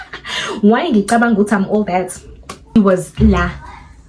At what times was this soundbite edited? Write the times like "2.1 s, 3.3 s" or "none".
2.7 s